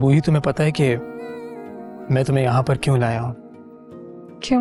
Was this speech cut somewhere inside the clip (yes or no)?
no